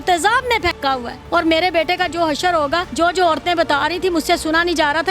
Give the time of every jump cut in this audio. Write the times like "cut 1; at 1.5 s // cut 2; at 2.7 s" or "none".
cut 1; at 1.1 s // cut 2; at 2.9 s